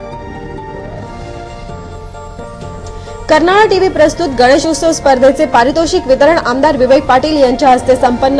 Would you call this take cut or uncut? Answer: cut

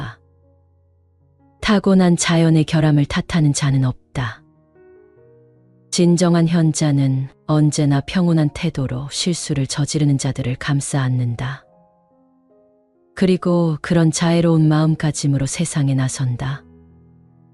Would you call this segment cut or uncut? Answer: uncut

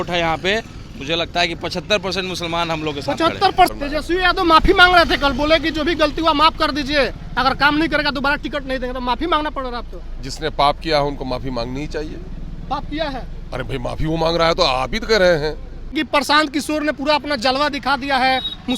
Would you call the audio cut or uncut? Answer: cut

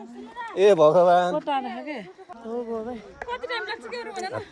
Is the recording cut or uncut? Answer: cut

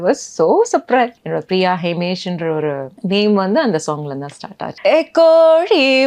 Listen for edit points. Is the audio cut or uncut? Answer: cut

